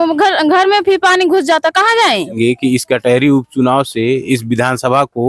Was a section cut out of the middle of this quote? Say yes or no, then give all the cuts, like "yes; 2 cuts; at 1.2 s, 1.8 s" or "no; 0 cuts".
yes; 1 cut; at 2.4 s